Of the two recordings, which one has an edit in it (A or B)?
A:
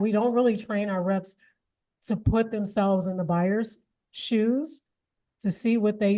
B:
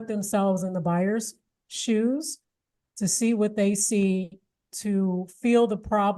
B